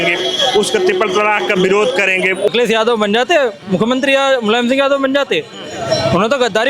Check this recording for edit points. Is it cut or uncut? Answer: cut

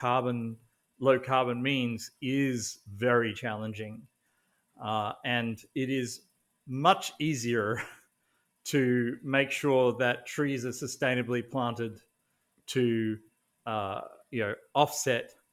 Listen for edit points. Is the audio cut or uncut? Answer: uncut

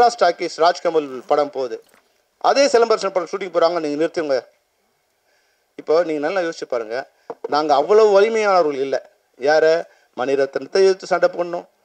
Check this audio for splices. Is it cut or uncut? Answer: uncut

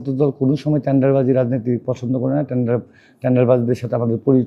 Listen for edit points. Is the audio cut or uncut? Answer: uncut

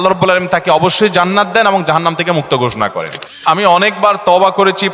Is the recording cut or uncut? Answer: cut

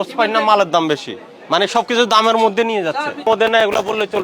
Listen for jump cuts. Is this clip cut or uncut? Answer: cut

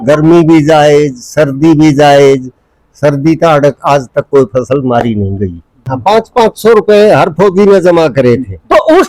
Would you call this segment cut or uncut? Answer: cut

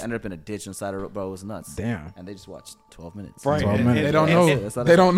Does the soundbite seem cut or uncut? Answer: uncut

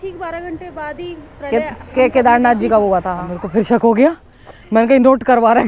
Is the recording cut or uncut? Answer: cut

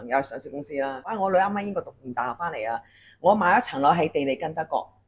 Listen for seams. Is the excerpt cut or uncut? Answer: cut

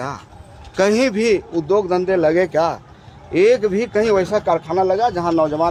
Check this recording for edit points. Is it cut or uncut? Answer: uncut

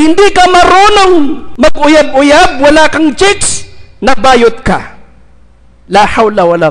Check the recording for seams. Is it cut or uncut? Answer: cut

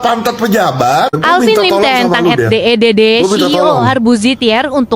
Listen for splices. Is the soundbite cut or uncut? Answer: uncut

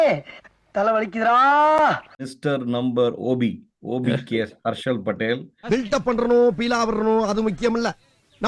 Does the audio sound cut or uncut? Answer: cut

